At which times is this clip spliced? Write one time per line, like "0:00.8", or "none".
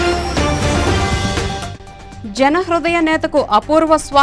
0:01.5